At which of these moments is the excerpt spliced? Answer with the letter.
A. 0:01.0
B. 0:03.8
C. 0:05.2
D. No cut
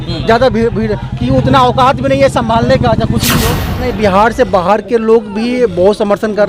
B